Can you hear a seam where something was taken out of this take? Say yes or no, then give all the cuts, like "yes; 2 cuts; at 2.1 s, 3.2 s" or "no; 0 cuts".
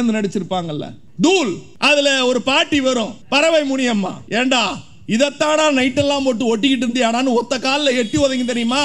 yes; 4 cuts; at 1.0 s, 1.7 s, 3.2 s, 4.2 s